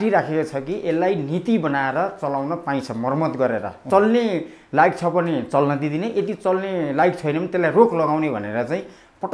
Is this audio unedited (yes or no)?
no